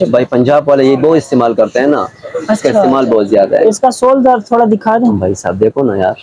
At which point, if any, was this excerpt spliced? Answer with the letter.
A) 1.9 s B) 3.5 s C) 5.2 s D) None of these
D